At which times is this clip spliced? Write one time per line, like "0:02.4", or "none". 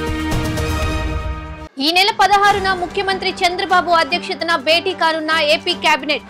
0:01.5